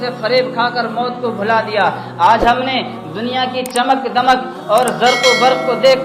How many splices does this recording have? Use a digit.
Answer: 0